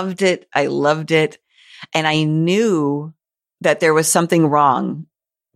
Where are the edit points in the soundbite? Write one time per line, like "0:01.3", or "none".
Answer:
none